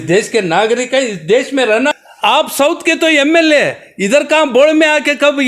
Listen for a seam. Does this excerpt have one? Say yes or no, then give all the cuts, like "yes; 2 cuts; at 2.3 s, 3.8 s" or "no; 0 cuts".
yes; 1 cut; at 1.9 s